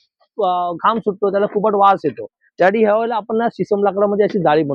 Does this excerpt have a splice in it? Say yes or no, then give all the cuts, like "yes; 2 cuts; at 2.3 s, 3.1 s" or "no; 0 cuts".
no; 0 cuts